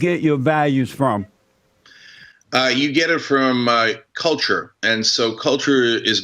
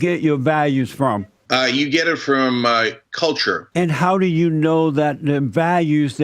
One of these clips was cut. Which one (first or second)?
second